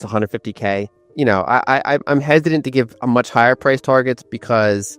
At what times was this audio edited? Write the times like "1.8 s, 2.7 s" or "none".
1.0 s